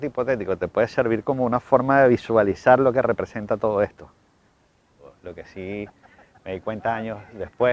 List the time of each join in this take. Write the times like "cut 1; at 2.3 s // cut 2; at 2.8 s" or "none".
cut 1; at 5.1 s